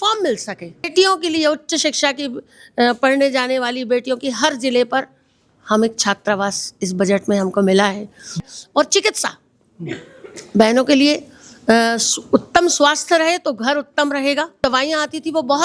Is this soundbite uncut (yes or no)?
no